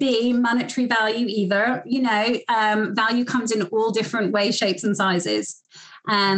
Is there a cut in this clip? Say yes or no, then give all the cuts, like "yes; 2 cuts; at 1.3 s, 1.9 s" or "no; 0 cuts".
no; 0 cuts